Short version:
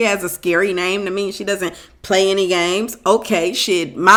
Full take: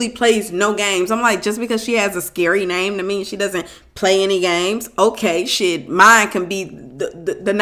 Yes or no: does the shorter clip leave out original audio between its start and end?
no